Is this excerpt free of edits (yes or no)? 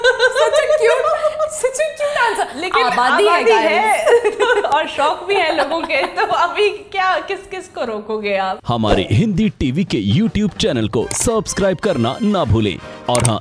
no